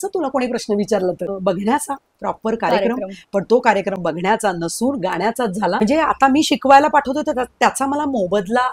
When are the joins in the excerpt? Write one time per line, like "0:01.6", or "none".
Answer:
0:01.3
0:05.8